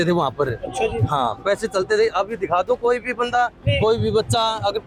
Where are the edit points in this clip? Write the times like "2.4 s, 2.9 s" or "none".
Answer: none